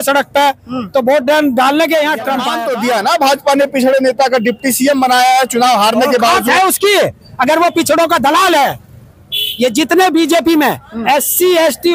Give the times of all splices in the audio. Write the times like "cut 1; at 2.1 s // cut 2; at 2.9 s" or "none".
cut 1; at 2.5 s